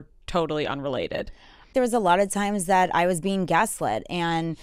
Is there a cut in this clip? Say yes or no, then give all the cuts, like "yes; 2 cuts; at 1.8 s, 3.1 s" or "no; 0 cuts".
yes; 1 cut; at 1.7 s